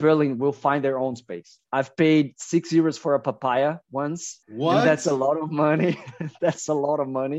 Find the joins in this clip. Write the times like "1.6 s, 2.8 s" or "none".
1.6 s